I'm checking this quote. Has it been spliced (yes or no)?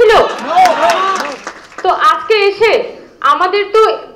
no